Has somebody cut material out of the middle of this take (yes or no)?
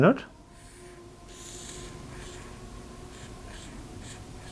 no